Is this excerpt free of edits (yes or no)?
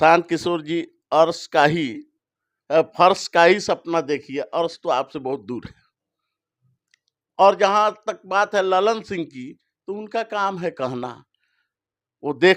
yes